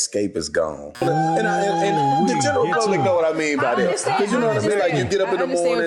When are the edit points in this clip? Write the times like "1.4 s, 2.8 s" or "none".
1.0 s

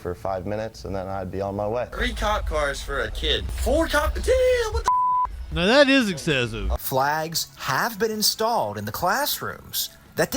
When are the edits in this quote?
1.9 s, 3.5 s, 6.6 s

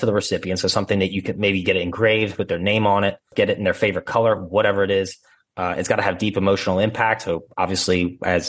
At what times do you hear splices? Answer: 3.3 s

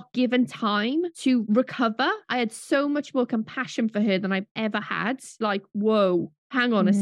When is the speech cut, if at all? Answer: 2.2 s, 5.4 s

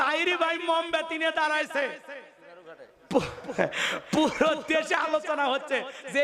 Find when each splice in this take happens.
none

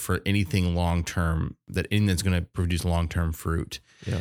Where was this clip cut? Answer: 1.7 s

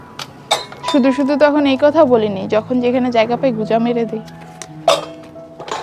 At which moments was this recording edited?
none

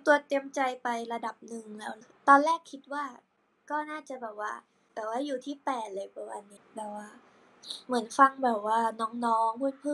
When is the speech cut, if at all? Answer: 2.1 s, 6.6 s

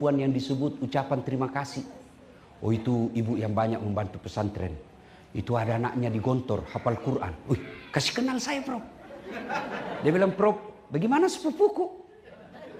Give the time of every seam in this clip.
none

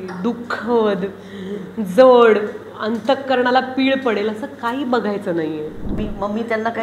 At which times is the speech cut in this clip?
5.9 s

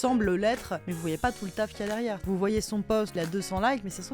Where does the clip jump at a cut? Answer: 0.9 s, 2.2 s, 3.1 s

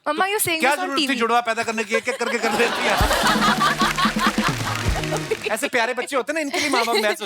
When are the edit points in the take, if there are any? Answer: 5.2 s

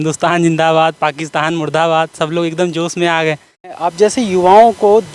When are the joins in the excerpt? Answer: 3.8 s

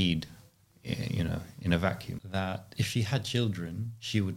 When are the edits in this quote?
2.1 s

